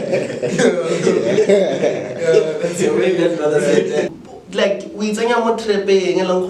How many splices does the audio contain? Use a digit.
1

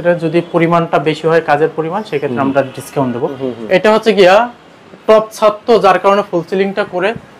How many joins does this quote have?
1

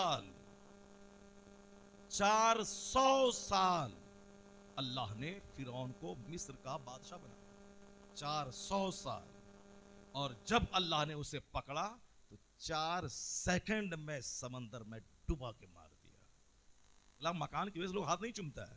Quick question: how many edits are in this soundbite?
1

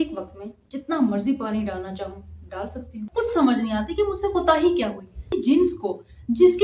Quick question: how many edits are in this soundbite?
2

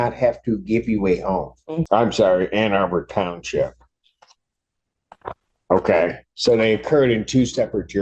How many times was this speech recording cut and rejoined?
1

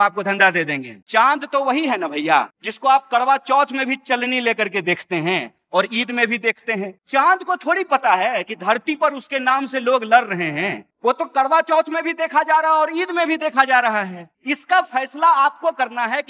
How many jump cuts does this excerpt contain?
1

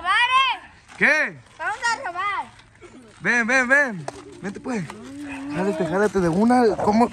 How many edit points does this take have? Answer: 1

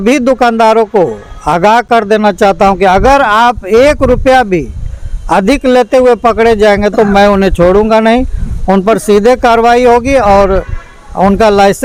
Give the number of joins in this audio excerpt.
0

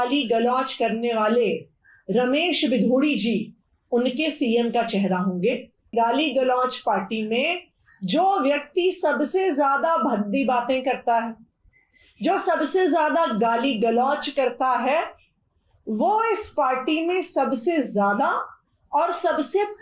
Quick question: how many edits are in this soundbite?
1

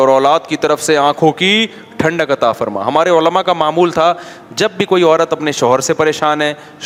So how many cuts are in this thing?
0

